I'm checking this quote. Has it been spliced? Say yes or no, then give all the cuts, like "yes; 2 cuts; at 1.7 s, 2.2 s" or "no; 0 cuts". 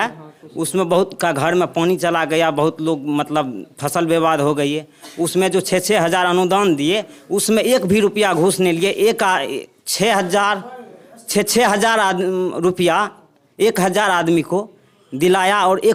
no; 0 cuts